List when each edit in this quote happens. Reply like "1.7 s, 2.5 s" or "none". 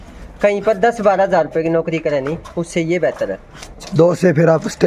none